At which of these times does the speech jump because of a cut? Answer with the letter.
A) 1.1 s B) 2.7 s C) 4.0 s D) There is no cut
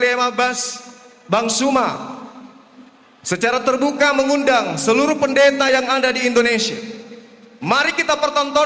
D